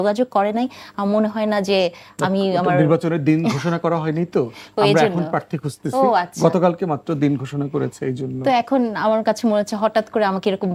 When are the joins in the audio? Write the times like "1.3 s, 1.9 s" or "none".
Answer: none